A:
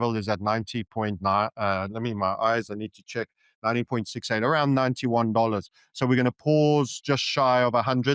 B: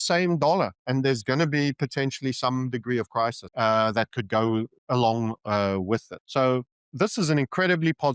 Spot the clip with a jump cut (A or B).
B